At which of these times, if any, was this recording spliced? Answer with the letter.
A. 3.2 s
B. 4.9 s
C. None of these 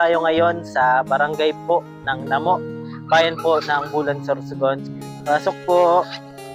B